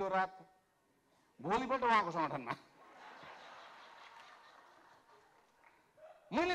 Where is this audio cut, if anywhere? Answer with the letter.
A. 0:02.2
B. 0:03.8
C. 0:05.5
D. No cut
D